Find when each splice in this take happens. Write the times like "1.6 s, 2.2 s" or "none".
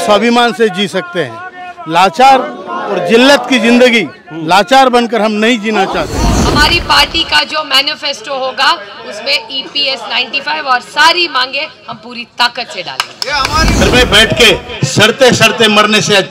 6.4 s, 13.8 s